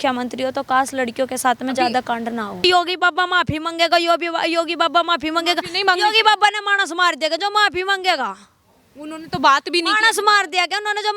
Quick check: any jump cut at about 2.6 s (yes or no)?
yes